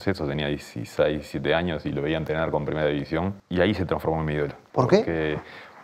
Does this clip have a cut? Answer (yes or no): yes